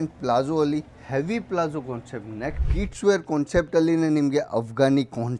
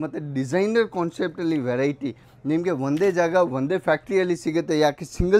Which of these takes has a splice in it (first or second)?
first